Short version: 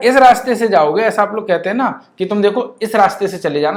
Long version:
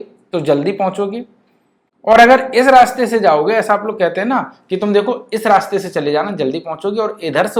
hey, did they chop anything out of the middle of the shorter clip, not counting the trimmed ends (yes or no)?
no